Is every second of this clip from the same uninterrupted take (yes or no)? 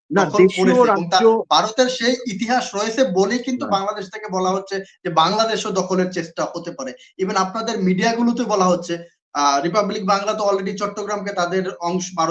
yes